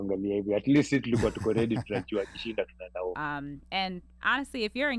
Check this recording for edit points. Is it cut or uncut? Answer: cut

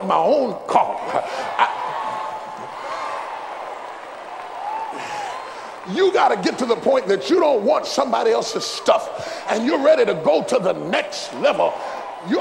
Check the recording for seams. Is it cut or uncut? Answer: uncut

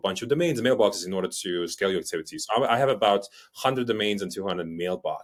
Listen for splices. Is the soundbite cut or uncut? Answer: uncut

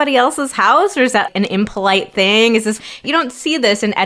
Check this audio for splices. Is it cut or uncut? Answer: cut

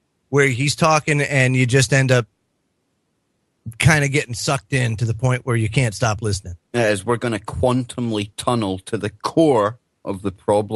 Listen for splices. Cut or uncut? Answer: uncut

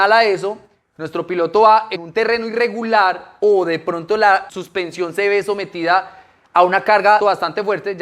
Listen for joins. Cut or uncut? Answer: cut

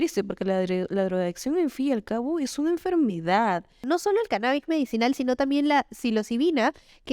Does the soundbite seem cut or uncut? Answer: cut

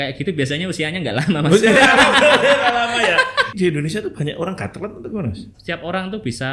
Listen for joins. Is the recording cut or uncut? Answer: cut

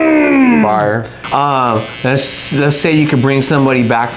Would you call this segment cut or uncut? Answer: cut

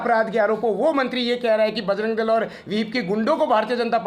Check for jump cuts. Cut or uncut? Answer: uncut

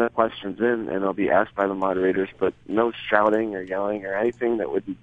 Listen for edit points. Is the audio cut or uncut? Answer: uncut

